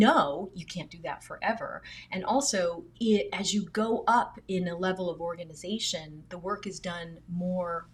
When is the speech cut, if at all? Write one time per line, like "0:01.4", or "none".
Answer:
none